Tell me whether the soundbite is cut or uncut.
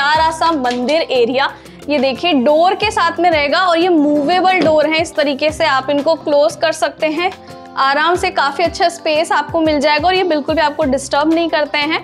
uncut